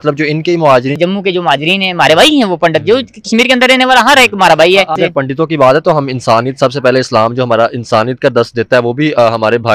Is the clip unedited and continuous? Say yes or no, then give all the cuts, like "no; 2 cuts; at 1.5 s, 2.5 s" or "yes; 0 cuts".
no; 2 cuts; at 1.0 s, 5.0 s